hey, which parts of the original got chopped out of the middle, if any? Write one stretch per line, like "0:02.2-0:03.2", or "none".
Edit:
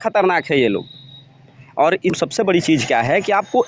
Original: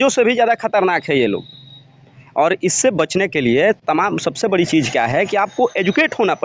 0:02.7-0:04.2